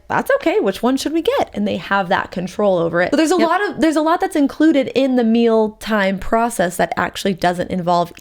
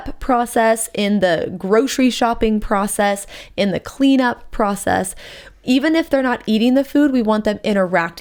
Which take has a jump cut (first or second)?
first